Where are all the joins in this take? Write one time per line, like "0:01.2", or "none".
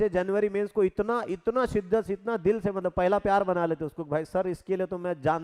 none